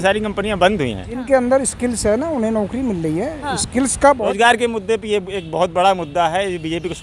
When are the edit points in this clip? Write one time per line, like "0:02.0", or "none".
0:01.3
0:04.2

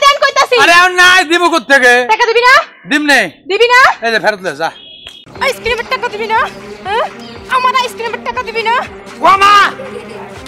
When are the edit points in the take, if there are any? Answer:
0:05.2
0:09.1

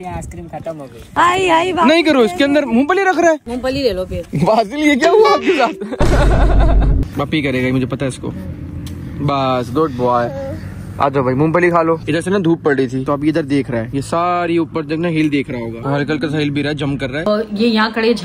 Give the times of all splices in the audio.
0:07.1
0:17.3

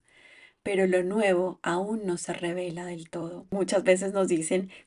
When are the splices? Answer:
0:03.5

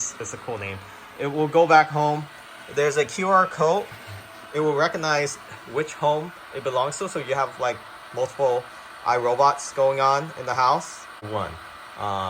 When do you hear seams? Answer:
0:11.3

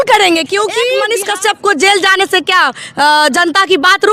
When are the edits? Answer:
0:01.0

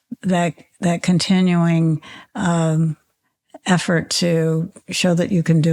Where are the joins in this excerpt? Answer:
none

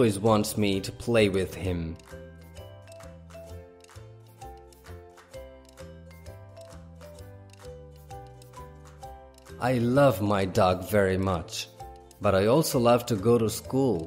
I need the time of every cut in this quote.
none

